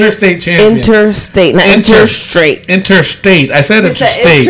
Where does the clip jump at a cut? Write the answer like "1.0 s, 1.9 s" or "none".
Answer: none